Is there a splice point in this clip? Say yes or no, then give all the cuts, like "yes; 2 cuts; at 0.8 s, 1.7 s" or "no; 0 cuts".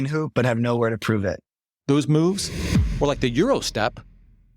yes; 1 cut; at 1.7 s